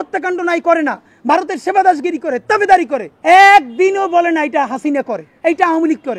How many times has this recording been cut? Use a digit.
2